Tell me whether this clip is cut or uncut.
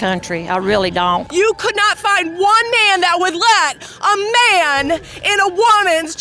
cut